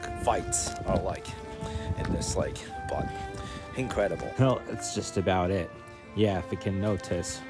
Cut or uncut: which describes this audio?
uncut